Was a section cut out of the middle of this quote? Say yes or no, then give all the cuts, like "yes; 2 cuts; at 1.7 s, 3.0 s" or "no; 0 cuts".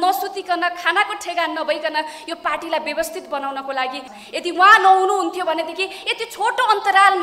yes; 1 cut; at 4.1 s